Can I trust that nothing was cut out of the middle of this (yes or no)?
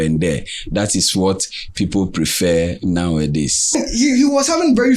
no